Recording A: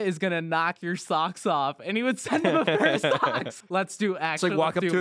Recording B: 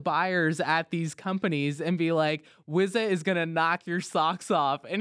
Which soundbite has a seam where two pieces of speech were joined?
A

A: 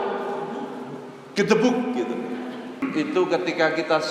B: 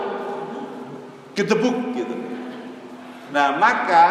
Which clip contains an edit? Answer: A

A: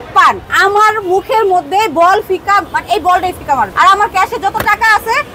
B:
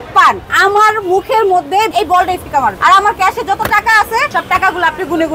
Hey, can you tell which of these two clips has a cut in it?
B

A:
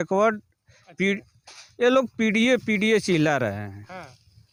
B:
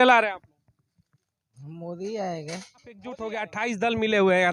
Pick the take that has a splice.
B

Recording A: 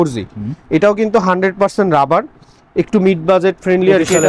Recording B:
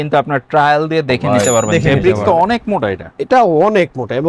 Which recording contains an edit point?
B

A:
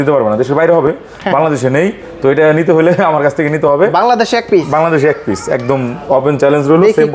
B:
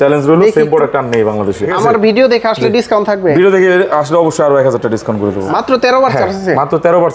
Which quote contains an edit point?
B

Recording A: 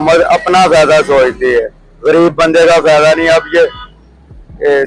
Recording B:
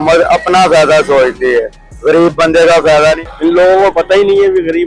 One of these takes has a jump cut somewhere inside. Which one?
B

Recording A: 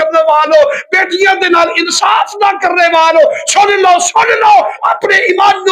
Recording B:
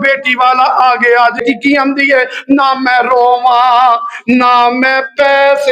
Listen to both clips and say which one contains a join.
B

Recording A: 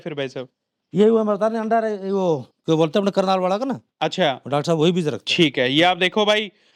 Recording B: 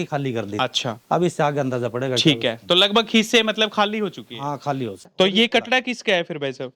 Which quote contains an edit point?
B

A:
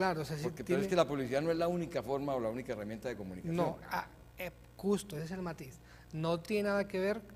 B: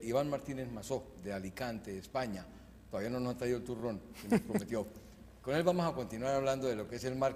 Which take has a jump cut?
B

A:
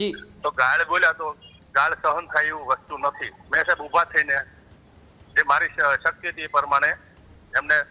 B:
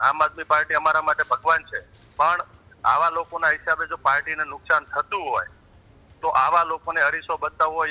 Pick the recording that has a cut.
A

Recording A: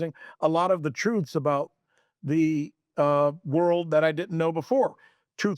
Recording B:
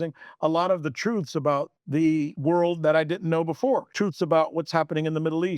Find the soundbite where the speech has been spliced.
B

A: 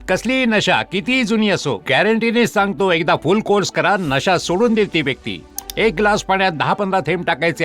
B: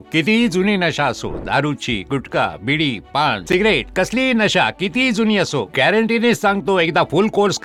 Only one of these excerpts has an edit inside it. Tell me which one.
A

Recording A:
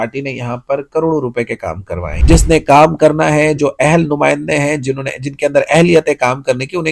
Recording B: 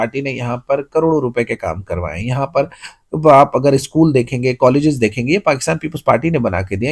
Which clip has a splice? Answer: A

